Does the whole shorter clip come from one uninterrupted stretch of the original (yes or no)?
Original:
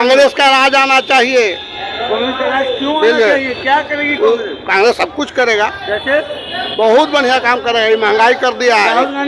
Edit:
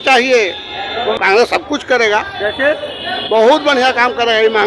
no